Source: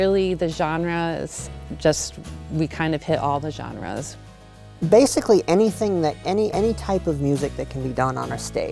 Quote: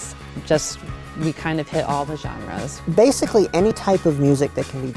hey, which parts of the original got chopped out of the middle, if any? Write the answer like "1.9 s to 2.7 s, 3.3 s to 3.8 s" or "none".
4.1 s to 4.7 s, 5.7 s to 6.8 s

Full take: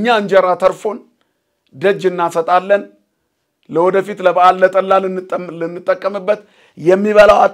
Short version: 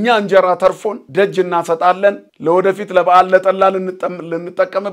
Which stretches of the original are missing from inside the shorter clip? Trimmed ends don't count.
0.9 s to 1.6 s, 3.0 s to 3.6 s

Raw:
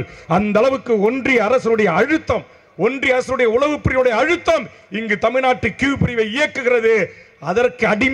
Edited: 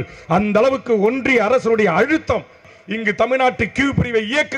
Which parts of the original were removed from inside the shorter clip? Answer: 2.7 s to 4.7 s

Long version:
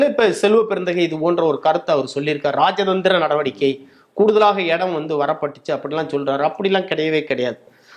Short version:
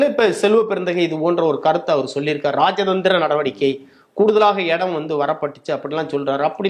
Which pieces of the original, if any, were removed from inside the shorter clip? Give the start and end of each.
none

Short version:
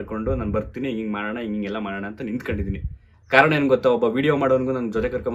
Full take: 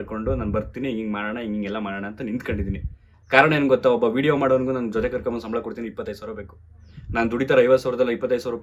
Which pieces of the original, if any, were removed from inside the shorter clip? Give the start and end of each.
none

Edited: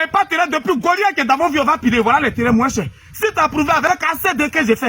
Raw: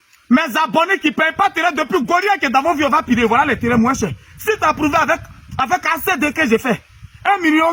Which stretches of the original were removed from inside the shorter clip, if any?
5.1 s to 5.7 s

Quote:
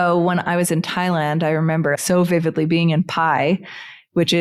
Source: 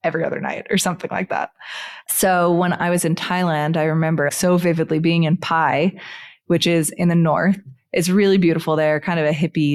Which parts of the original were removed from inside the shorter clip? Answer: none

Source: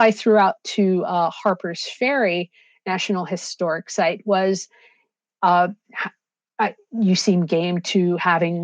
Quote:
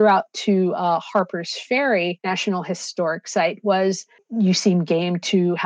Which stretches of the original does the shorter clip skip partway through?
2.5 s to 2.8 s, 4.8 s to 6.8 s

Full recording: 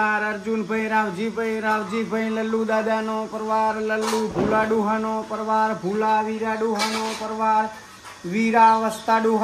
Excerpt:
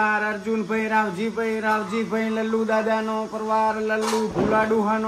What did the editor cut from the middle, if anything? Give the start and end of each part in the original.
none

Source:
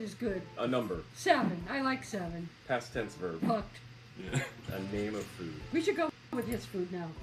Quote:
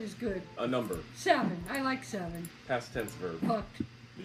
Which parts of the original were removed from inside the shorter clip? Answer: none

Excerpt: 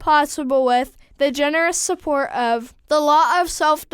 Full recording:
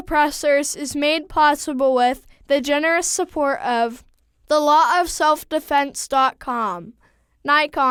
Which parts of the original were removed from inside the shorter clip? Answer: 4.0 s to 4.3 s

